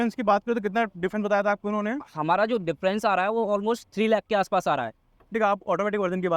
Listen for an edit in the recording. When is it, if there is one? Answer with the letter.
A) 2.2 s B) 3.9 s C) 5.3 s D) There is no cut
C